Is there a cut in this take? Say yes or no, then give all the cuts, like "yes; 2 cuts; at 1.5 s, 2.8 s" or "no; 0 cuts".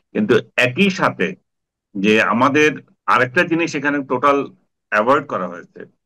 yes; 1 cut; at 2.9 s